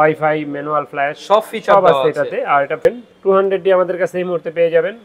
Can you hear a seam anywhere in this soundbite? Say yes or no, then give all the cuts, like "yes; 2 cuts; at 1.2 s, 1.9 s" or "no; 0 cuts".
yes; 1 cut; at 2.8 s